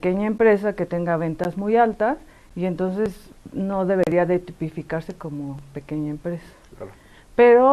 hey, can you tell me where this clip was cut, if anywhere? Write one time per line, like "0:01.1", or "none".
0:04.8